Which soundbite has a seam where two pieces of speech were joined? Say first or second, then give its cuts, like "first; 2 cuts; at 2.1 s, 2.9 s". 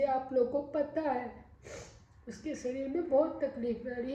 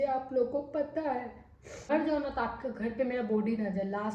second; 1 cut; at 1.9 s